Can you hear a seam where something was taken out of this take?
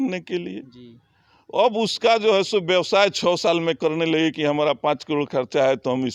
no; 0 cuts

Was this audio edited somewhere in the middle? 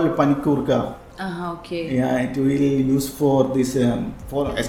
no; 0 cuts

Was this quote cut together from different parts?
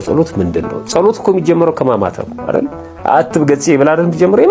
no; 0 cuts

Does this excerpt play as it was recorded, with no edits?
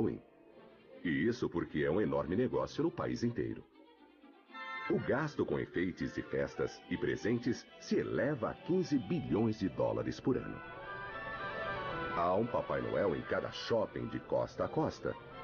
no; 1 cut; at 11.6 s

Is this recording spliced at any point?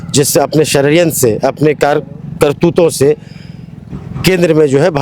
no; 0 cuts

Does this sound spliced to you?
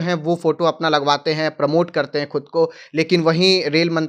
no; 0 cuts

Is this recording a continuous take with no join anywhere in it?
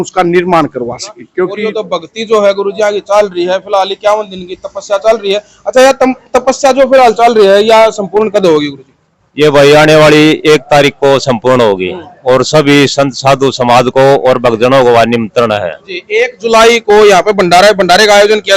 no; 1 cut; at 1.8 s

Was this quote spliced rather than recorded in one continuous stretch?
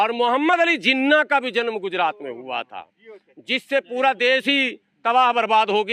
no; 0 cuts

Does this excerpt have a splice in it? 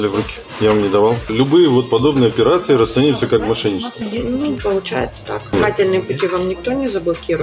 yes; 2 cuts; at 1.3 s, 5.5 s

